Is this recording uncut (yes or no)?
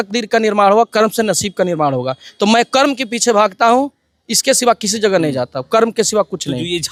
yes